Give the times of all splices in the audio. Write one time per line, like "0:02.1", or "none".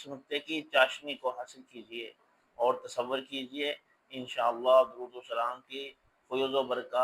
none